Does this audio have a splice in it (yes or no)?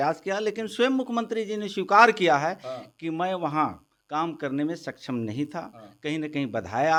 no